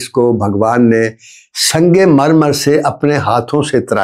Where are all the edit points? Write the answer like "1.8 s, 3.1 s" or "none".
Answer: none